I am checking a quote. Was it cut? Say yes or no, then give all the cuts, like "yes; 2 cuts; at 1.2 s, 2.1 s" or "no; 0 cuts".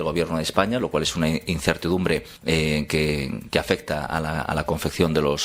yes; 1 cut; at 2.3 s